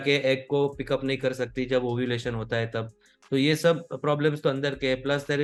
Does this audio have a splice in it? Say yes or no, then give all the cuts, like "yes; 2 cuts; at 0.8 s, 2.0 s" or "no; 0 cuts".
no; 0 cuts